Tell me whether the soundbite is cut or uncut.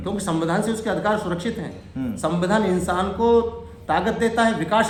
uncut